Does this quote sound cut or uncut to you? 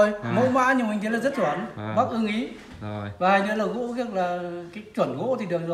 uncut